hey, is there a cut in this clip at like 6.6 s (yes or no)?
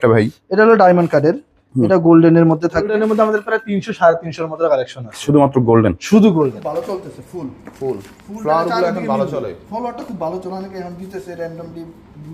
yes